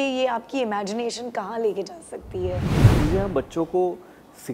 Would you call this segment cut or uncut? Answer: cut